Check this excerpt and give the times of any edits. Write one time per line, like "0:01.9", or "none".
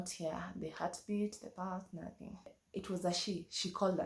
0:02.6